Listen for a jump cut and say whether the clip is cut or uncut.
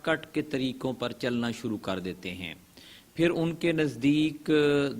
uncut